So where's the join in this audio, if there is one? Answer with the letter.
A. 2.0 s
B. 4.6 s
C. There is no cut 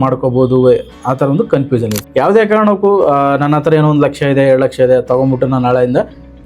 A